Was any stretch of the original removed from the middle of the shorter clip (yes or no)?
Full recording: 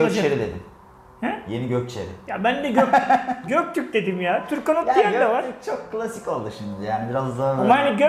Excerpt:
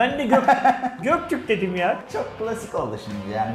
yes